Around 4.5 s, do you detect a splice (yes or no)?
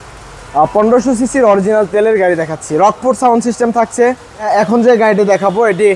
yes